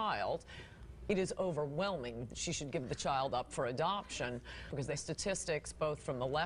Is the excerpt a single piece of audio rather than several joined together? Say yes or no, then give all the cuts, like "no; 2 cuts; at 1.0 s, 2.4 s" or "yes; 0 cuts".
no; 1 cut; at 4.8 s